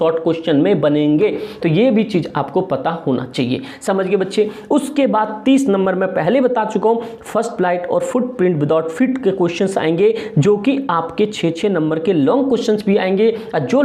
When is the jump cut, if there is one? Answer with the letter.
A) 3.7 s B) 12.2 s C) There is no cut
C